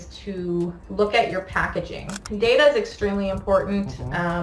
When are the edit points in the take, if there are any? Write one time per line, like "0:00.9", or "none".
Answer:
0:02.2